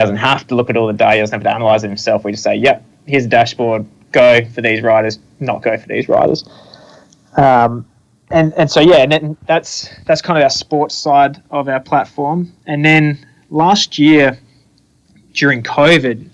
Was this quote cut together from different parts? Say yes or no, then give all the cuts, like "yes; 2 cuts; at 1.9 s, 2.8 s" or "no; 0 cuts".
no; 0 cuts